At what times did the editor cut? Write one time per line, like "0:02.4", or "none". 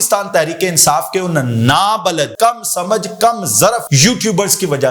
0:02.3
0:03.9